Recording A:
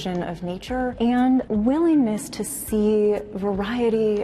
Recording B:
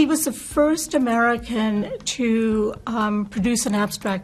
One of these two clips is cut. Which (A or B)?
A